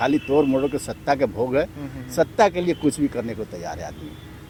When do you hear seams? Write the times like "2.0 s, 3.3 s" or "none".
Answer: none